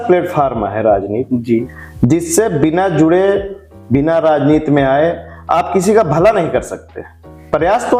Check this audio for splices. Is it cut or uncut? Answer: uncut